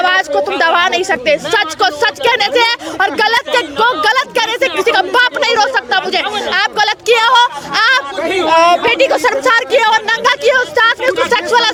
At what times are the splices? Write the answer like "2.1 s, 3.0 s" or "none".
none